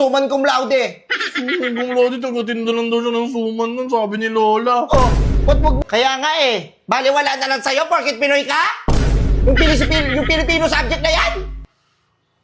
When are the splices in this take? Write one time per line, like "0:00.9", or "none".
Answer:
0:05.8